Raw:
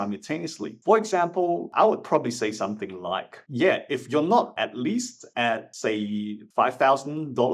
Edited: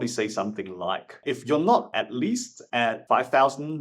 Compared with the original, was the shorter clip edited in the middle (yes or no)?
yes